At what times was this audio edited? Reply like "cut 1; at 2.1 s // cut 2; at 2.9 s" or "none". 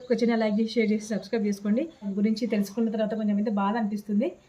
cut 1; at 2.1 s